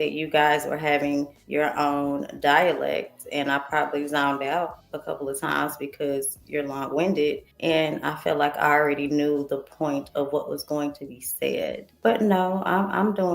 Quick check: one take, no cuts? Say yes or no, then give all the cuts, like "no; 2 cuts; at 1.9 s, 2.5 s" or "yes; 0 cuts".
no; 4 cuts; at 1.4 s, 4.9 s, 7.5 s, 11.9 s